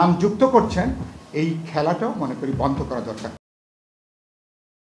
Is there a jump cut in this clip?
no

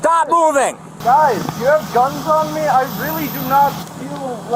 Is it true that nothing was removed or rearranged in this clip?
yes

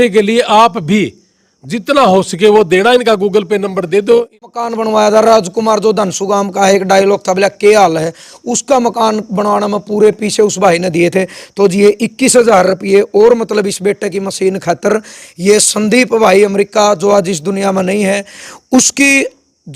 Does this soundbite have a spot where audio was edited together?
yes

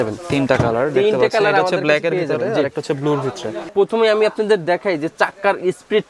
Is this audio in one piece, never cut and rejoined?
no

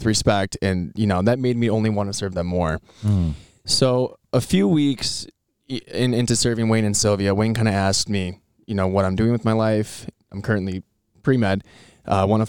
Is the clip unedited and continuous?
no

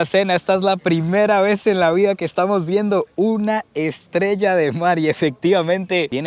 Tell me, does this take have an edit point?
no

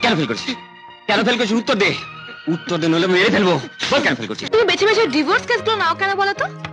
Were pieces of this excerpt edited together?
yes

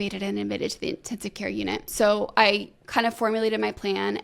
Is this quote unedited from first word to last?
no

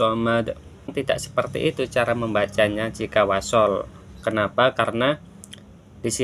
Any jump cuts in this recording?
yes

